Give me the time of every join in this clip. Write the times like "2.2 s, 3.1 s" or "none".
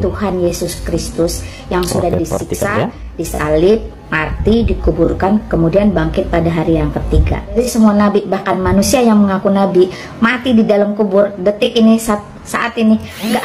7.6 s